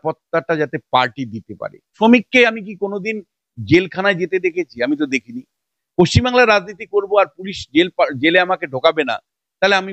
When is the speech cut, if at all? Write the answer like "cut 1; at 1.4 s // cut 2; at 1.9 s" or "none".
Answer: cut 1; at 2.0 s